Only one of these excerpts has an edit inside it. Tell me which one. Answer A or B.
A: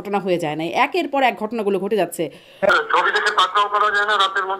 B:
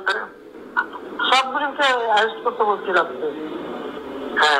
A